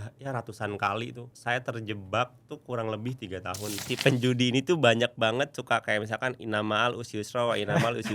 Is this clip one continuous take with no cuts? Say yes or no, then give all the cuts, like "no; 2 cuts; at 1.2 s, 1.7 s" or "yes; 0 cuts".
no; 2 cuts; at 1.3 s, 3.9 s